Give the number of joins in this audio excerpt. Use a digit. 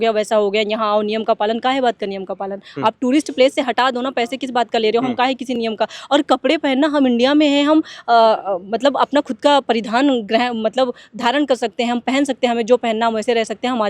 0